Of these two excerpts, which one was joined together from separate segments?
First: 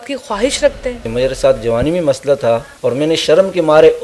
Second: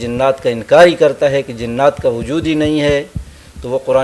first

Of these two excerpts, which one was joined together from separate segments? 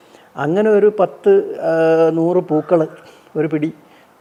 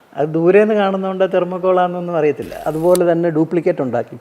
second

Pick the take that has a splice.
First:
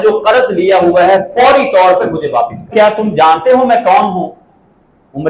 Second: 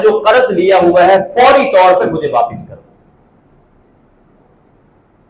first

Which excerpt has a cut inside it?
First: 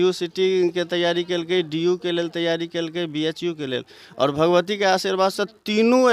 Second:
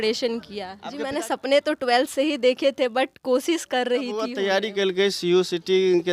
second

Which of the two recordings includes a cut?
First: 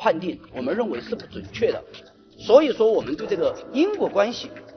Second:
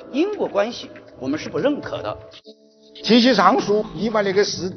second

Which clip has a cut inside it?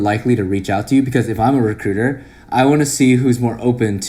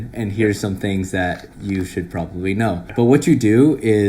second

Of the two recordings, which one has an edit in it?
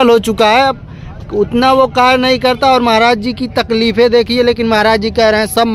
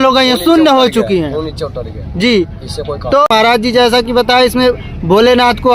second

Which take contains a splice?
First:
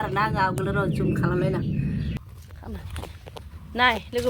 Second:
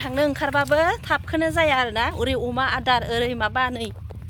first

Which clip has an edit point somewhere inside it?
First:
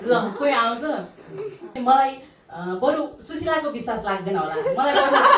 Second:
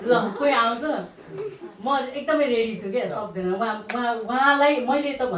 first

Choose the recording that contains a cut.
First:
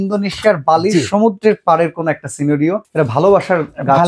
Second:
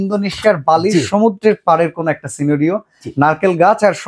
first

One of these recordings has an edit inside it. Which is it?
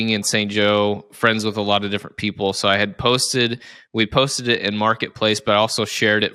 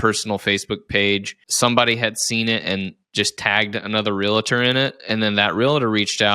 second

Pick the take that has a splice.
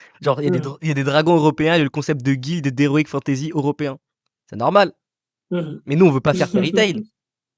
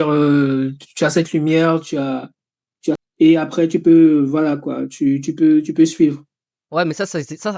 second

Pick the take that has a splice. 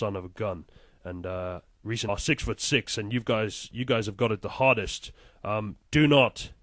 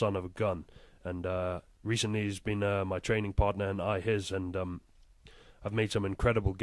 second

